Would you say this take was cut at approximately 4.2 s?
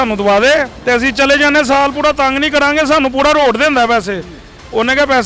no; 0 cuts

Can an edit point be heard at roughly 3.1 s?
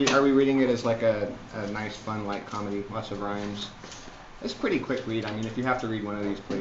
no; 1 cut; at 1.9 s

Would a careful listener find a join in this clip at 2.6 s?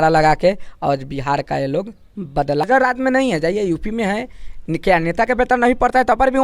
yes; 1 cut; at 2.6 s

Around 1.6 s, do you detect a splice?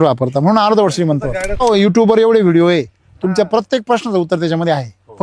yes; 1 cut; at 1.6 s

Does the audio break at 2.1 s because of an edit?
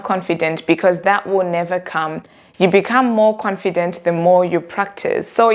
no; 0 cuts

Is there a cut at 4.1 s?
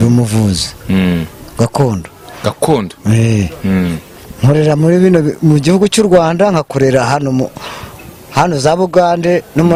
no; 0 cuts

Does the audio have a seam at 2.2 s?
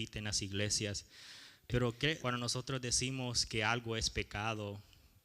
yes; 1 cut; at 2.2 s

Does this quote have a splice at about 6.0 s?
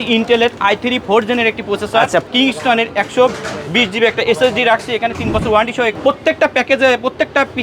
yes; 2 cuts; at 2.3 s, 6.0 s

